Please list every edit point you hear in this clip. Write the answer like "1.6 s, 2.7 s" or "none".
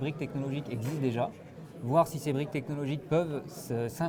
none